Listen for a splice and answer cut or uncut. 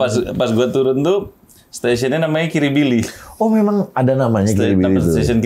uncut